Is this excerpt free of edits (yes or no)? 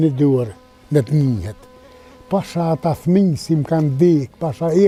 yes